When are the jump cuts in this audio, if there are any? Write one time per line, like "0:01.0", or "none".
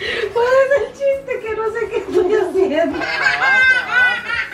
0:03.2